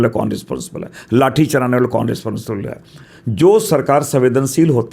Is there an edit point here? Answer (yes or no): no